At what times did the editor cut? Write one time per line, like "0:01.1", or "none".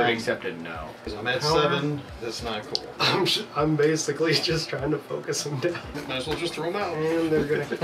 0:01.1
0:05.9